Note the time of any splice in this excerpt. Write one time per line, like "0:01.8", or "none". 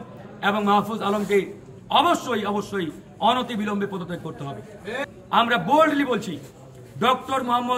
0:05.0